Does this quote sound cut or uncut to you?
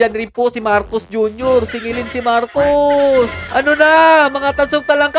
cut